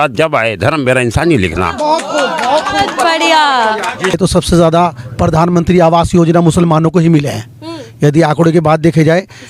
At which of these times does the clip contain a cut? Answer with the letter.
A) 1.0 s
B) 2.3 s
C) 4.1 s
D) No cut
C